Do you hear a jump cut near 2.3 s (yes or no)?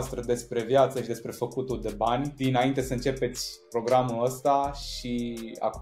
yes